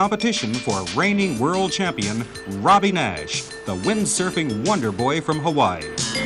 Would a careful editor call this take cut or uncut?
cut